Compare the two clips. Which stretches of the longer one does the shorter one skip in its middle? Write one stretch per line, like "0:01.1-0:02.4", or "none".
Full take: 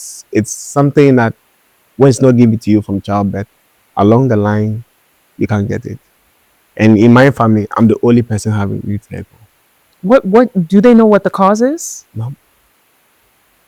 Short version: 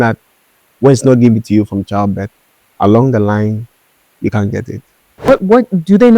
0:06.4-0:10.1